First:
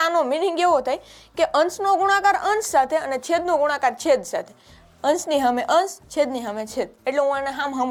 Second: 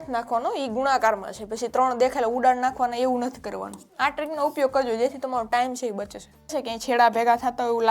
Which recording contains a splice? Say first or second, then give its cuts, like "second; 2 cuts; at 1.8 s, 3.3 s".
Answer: second; 2 cuts; at 3.8 s, 6.6 s